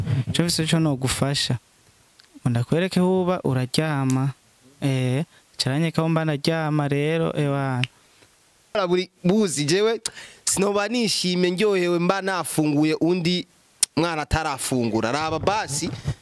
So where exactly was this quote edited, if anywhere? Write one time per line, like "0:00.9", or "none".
0:08.8